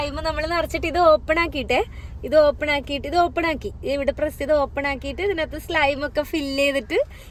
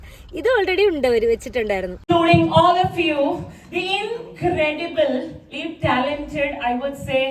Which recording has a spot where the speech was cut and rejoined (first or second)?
second